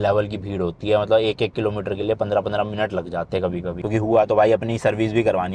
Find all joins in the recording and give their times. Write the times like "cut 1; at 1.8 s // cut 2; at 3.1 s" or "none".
cut 1; at 3.7 s